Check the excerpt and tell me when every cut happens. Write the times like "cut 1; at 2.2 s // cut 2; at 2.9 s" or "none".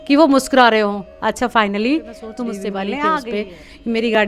cut 1; at 3.3 s